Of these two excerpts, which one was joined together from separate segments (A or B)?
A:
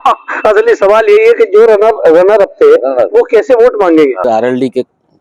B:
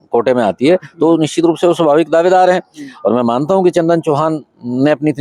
A